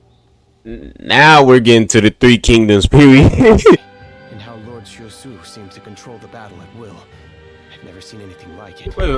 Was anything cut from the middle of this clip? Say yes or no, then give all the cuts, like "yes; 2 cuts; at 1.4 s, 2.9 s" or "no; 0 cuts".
yes; 1 cut; at 3.8 s